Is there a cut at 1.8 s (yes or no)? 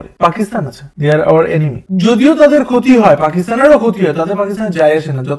yes